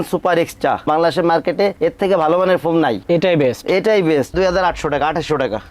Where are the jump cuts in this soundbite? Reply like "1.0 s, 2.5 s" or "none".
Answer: 4.3 s